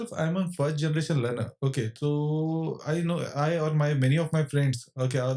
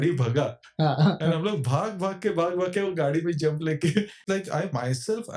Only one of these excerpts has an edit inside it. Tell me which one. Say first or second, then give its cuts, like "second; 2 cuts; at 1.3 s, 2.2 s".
second; 1 cut; at 4.2 s